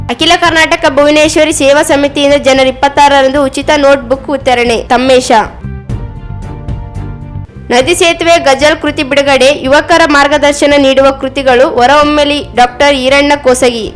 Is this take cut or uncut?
uncut